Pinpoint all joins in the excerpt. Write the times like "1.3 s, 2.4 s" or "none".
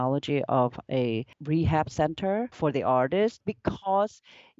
1.4 s, 2.6 s, 3.4 s